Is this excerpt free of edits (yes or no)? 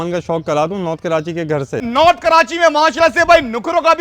no